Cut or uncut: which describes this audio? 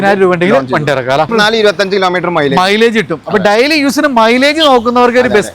cut